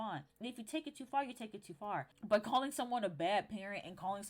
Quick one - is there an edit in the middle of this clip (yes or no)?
yes